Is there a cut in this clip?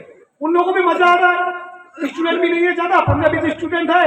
no; 0 cuts

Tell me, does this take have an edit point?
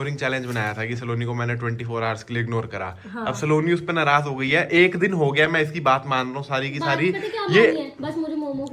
no; 0 cuts

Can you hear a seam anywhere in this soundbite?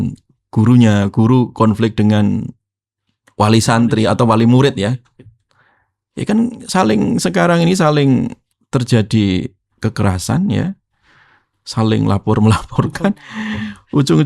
yes; 1 cut; at 8.4 s

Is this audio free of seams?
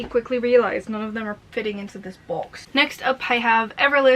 yes; 0 cuts

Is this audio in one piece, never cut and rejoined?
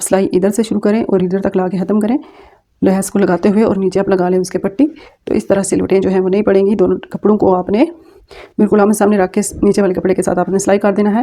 yes; 0 cuts

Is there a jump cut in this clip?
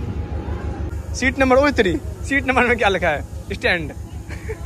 yes; 1 cut; at 0.9 s

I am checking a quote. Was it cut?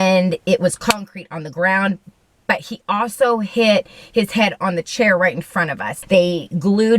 yes; 1 cut; at 5.9 s

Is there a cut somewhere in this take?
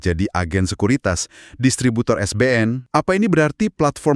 yes; 1 cut; at 2.8 s

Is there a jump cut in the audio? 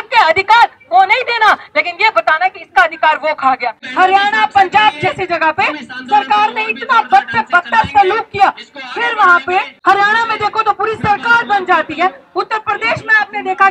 yes; 2 cuts; at 3.8 s, 9.7 s

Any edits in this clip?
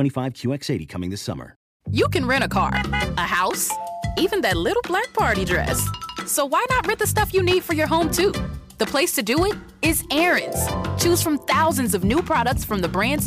yes; 1 cut; at 1.7 s

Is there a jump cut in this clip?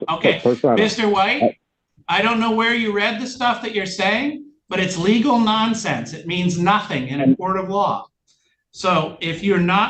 no; 0 cuts

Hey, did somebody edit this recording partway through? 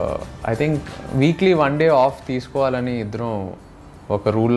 no; 0 cuts

